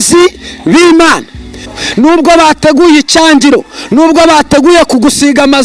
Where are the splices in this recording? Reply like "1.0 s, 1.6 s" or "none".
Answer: 1.8 s